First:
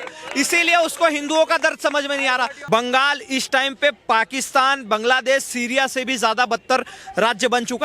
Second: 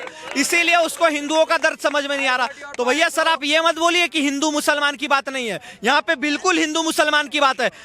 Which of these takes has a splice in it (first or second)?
first